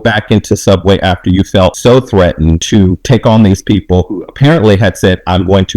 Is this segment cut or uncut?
cut